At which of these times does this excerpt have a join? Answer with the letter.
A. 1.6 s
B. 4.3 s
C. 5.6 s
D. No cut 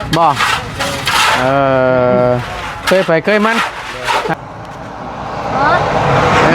B